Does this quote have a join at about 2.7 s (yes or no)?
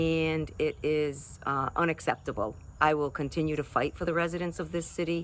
yes